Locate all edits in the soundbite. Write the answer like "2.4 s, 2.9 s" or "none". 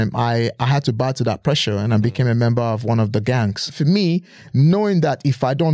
3.8 s